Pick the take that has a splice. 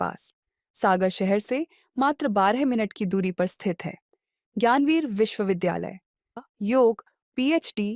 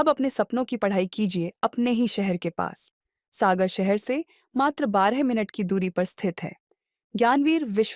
first; 1 cut; at 6.4 s

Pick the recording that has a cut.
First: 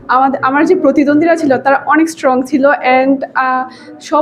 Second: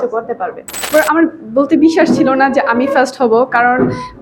second; 1 cut; at 0.9 s

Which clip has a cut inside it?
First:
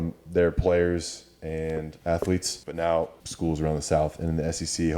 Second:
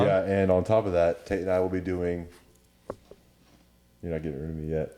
first; 3 cuts; at 1.9 s, 2.6 s, 3.2 s

